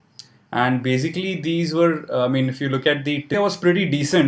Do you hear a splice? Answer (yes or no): no